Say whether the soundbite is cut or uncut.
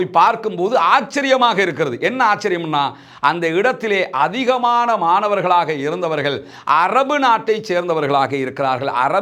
uncut